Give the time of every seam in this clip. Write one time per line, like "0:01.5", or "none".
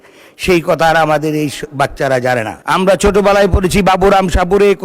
0:02.6

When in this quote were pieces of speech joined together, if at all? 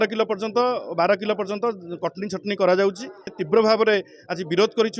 0:03.3

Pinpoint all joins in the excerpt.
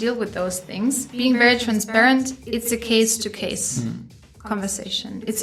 0:01.1

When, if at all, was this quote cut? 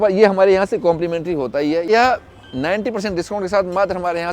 0:01.9

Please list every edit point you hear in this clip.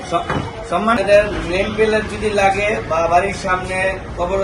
0:01.0

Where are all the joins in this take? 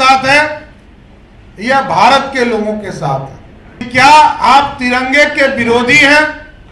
0:03.9

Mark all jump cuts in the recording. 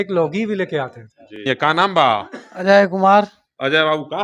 0:01.4

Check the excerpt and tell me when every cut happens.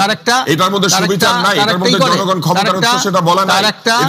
none

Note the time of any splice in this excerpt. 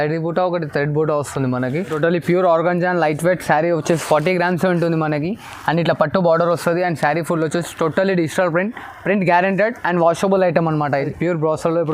0:01.9
0:11.1

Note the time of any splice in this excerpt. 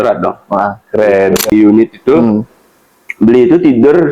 0:01.5

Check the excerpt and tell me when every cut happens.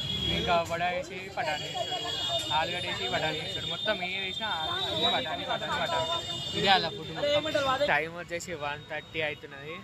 0:07.9

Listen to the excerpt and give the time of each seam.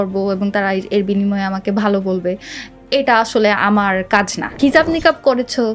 0:04.6

